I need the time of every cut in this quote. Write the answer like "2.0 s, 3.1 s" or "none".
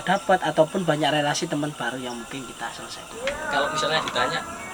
3.1 s

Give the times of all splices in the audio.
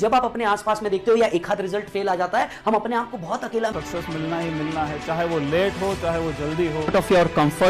3.8 s

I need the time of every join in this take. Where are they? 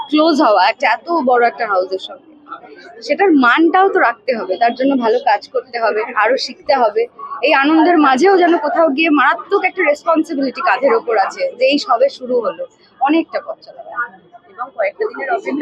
none

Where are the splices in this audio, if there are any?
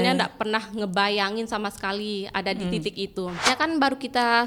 3.5 s

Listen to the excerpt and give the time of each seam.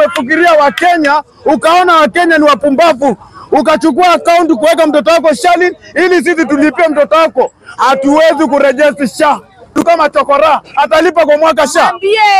9.7 s

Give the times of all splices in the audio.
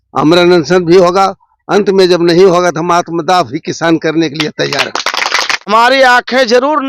5.7 s

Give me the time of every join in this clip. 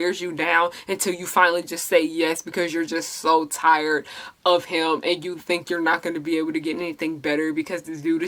none

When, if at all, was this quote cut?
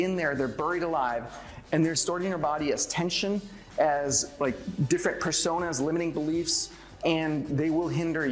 2.0 s, 4.6 s, 7.0 s

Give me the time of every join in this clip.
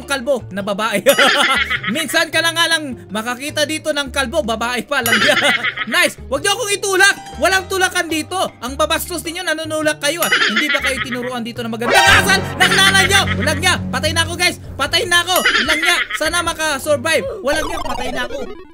5.8 s

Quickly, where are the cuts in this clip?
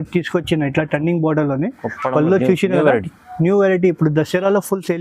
none

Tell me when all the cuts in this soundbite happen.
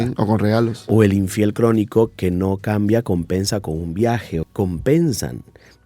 4.5 s

